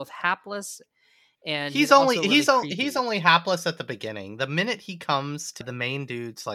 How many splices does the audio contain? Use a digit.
1